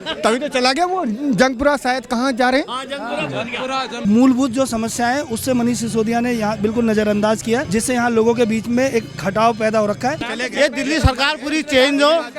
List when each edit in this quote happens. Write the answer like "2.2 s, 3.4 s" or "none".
4.0 s, 7.7 s, 10.3 s